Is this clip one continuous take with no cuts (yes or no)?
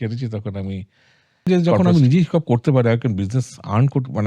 no